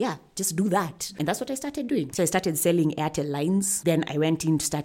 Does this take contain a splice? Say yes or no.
yes